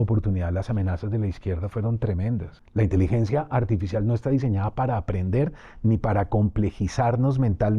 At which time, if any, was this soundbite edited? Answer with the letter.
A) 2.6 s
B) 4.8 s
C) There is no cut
A